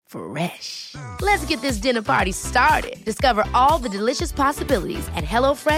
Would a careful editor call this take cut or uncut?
uncut